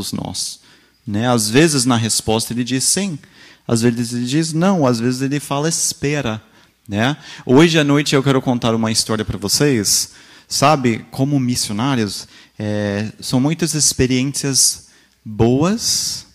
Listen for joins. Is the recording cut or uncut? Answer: uncut